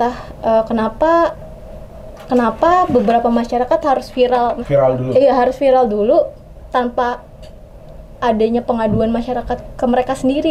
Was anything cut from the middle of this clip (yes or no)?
no